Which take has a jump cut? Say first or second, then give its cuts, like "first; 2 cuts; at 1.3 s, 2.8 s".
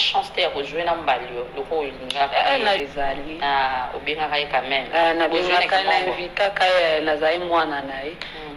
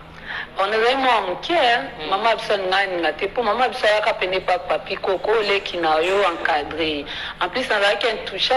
first; 1 cut; at 2.8 s